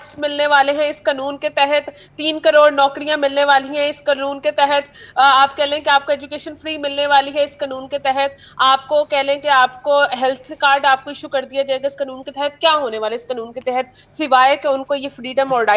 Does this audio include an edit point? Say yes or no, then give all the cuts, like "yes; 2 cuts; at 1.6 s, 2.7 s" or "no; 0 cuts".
no; 0 cuts